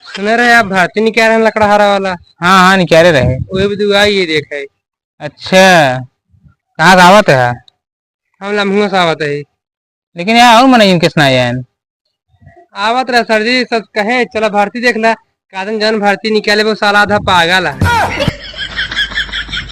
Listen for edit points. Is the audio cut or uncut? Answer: cut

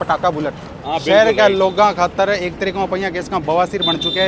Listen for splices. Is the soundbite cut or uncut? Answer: uncut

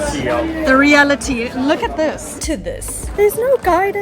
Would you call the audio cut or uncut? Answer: cut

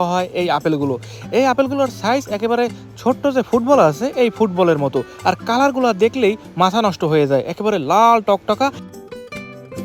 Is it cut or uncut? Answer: uncut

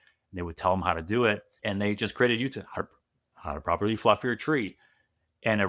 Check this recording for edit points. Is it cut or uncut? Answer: cut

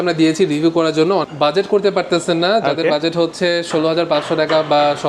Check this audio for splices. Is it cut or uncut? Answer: cut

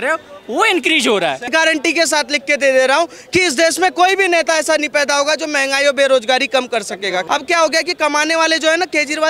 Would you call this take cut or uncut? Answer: cut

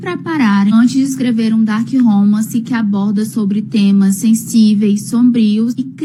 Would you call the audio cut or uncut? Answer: uncut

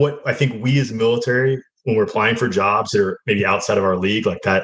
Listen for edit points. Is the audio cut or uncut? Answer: uncut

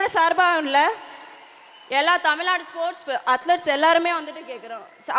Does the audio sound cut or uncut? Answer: uncut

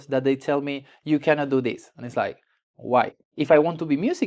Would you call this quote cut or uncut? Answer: cut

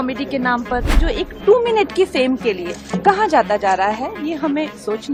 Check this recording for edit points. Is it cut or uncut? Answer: uncut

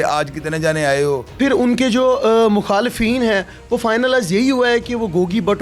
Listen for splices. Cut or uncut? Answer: cut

